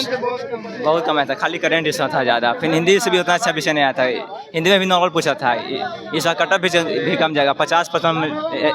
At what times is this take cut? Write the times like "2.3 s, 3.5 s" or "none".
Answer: none